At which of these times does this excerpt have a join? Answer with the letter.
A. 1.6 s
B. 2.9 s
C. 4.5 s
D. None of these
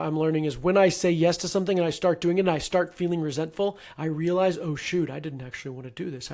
D